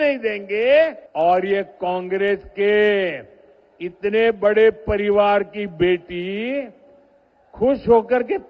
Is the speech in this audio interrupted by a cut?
yes; 1 cut; at 1.0 s

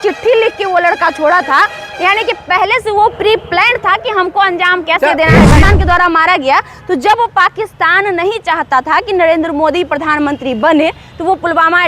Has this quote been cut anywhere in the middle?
yes; 1 cut; at 5.6 s

